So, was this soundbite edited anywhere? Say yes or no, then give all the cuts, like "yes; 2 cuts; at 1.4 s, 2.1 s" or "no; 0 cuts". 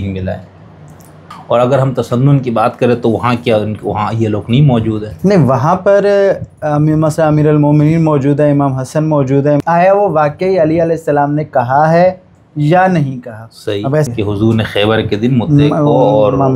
yes; 3 cuts; at 1.2 s, 9.6 s, 14.1 s